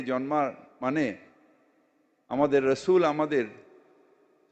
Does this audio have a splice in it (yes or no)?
no